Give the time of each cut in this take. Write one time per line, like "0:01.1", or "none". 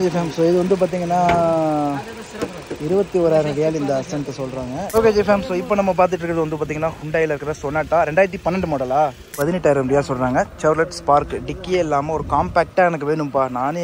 0:04.9
0:09.3